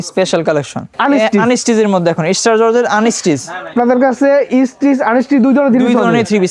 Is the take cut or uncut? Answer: cut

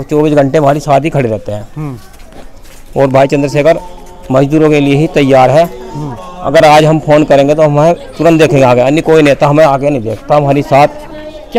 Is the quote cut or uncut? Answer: uncut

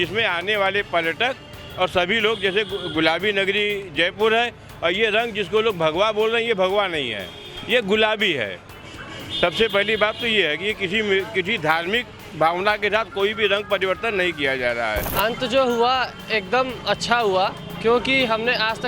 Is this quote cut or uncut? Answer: cut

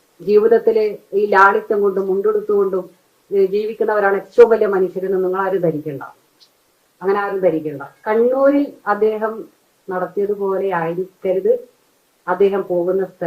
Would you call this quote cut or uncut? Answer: cut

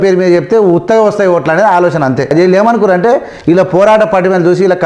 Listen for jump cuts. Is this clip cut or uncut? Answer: cut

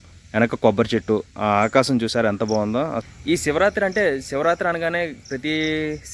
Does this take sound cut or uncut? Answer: cut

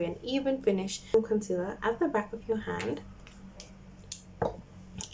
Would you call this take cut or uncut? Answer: cut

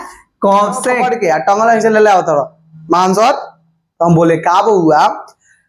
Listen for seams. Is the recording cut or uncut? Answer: cut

